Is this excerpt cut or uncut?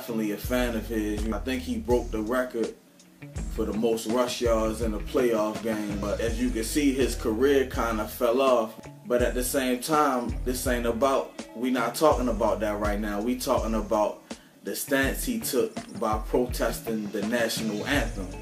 cut